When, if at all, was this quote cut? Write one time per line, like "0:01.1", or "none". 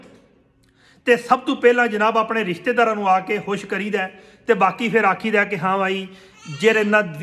none